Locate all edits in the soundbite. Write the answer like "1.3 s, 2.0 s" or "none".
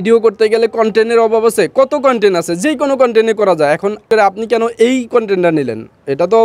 4.0 s